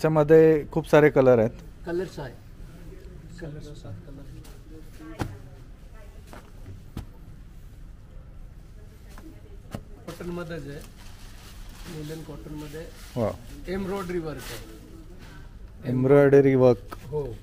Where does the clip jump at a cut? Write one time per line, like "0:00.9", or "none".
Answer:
0:10.1